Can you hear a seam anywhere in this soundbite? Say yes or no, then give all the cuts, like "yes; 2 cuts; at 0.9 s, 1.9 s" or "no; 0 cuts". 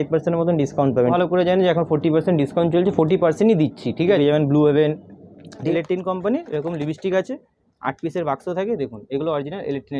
yes; 3 cuts; at 1.1 s, 4.2 s, 5.6 s